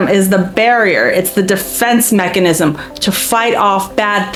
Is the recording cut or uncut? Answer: uncut